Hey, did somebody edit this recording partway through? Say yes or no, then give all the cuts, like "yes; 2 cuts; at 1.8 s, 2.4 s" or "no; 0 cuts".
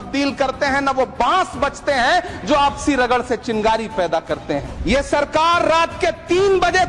yes; 1 cut; at 4.7 s